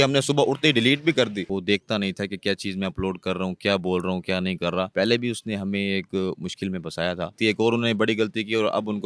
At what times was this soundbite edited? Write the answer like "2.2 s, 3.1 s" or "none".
1.4 s, 7.3 s